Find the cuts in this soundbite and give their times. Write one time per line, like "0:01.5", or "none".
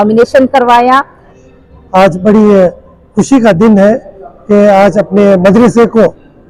0:01.3